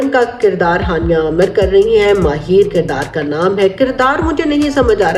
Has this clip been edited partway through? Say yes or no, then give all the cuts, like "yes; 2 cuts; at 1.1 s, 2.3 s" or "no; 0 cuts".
no; 0 cuts